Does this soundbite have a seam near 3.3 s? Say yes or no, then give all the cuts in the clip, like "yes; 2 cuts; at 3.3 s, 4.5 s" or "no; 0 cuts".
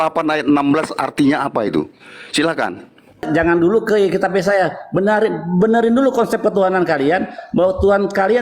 yes; 1 cut; at 3.3 s